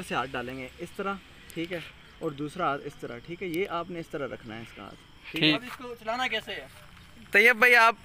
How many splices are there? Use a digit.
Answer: 1